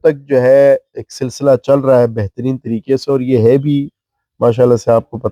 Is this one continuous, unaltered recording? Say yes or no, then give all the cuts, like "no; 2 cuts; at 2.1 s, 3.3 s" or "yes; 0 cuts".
yes; 0 cuts